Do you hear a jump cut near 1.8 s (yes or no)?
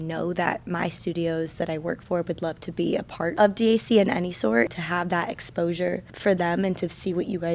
no